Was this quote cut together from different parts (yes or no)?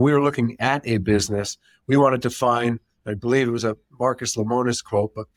no